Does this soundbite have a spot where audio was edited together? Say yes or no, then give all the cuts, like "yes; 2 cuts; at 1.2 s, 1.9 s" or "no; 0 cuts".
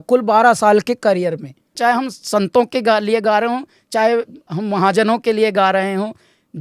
yes; 1 cut; at 1.6 s